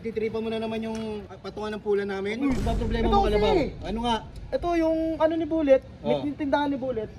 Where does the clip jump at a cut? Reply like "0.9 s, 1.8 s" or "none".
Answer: 2.6 s